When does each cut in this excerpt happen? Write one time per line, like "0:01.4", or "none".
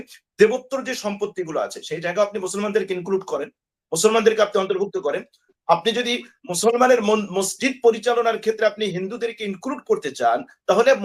none